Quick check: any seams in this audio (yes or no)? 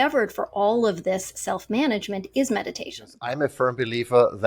yes